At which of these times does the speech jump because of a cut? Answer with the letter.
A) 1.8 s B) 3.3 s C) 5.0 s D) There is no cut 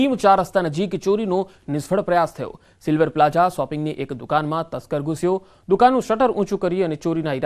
A